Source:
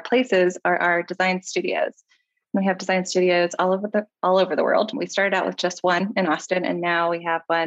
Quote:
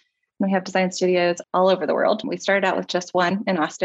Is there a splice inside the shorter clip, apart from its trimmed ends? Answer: yes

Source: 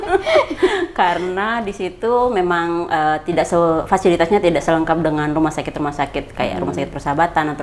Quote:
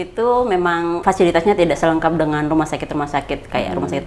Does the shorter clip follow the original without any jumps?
no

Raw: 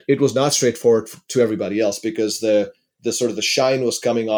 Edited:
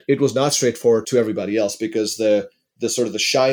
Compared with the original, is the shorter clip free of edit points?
no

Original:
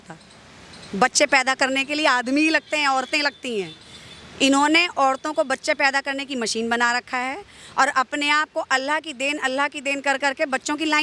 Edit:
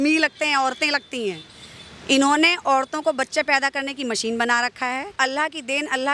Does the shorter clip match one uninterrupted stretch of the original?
no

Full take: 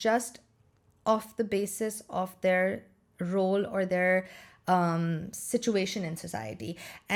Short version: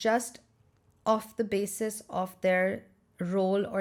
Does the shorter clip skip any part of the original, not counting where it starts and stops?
no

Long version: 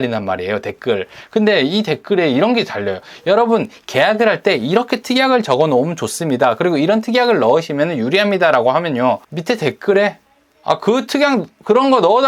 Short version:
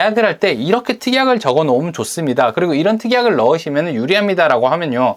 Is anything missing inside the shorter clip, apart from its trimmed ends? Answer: no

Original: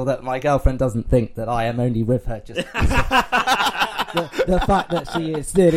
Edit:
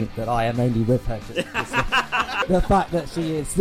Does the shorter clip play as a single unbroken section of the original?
no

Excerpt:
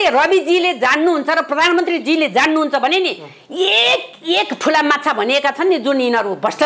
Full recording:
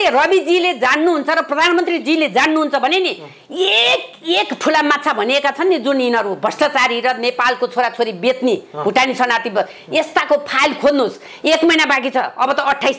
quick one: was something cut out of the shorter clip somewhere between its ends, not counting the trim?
no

